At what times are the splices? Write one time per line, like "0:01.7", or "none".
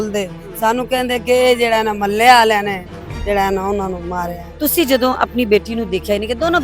0:04.4